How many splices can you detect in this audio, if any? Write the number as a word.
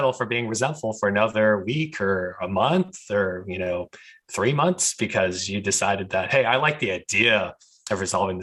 zero